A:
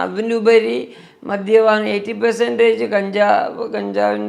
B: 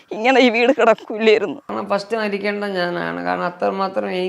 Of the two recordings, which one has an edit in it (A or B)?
B